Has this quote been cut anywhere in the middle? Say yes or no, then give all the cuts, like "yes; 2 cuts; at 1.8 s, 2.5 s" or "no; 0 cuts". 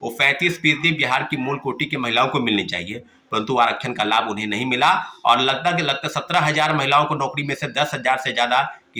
no; 0 cuts